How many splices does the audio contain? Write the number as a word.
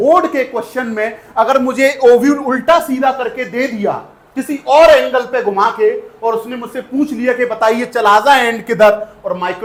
zero